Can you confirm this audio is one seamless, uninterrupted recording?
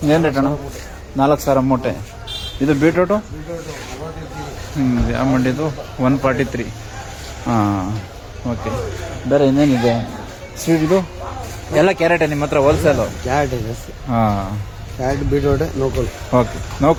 yes; 0 cuts

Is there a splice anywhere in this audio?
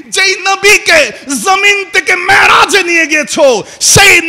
no; 0 cuts

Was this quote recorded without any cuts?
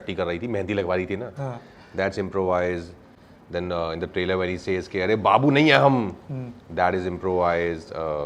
yes; 0 cuts

